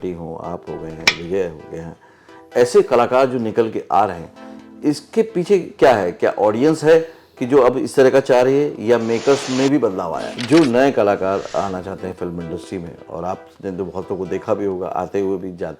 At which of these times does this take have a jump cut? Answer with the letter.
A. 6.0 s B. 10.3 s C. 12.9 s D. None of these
B